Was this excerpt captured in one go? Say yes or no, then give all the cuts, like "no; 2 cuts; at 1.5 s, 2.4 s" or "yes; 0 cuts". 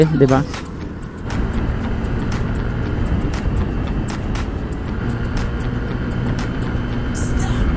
no; 2 cuts; at 1.3 s, 5.0 s